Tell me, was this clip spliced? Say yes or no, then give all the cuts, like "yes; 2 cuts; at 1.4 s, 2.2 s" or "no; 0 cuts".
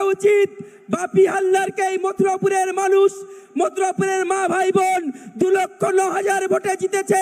no; 0 cuts